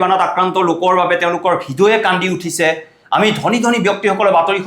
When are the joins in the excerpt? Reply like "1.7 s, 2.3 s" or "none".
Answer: none